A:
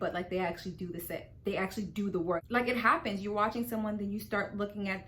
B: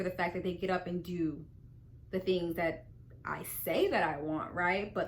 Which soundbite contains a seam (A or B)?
A